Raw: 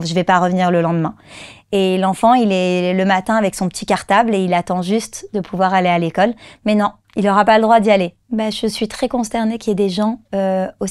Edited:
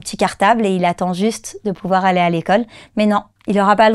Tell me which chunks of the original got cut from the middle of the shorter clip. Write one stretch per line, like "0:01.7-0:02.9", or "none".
none

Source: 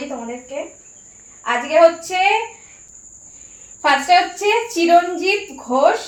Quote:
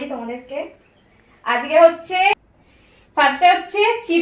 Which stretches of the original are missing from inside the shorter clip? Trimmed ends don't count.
0:02.3-0:03.0

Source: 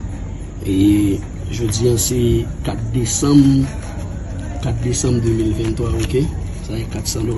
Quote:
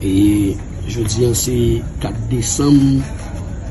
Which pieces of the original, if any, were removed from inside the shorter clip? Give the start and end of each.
none

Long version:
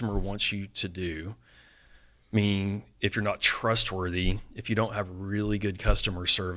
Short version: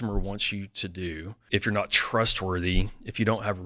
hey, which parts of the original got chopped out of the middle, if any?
0:01.4-0:02.9

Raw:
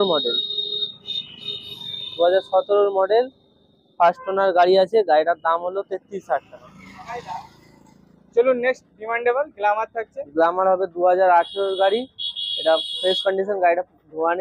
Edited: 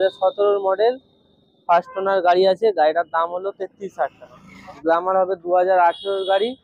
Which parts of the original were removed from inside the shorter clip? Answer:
0:07.0-0:10.2

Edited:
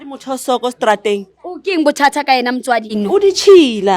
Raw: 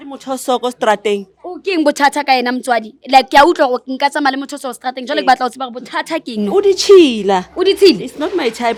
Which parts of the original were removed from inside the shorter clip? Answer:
0:02.9-0:06.3

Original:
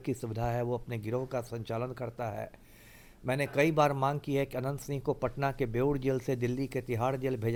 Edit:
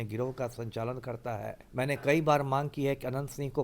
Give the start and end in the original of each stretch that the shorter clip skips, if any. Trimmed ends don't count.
0:02.5-0:03.1

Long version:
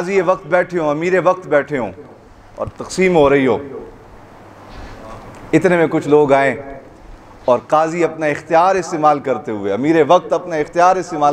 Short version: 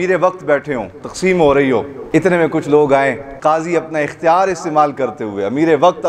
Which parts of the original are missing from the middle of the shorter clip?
0:02.0-0:02.8
0:03.7-0:05.4
0:06.8-0:07.6

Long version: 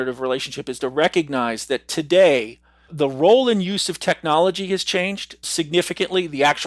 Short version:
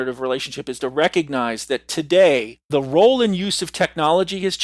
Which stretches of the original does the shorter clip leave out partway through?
0:02.6-0:02.8

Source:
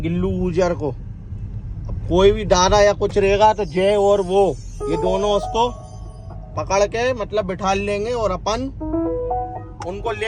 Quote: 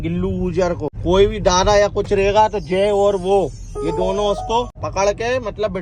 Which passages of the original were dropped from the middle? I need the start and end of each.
0:01.0-0:02.0
0:05.8-0:06.5

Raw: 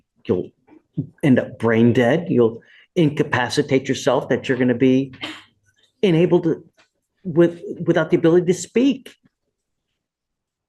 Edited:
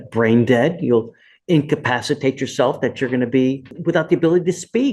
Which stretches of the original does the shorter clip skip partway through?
0:05.2-0:07.7

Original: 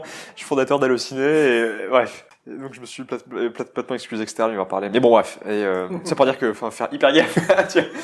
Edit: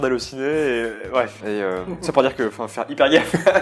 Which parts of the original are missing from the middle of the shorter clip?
0:02.2-0:05.4

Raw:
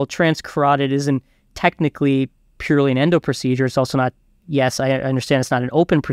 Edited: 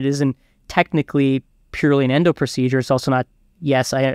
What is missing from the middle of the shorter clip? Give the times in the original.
none

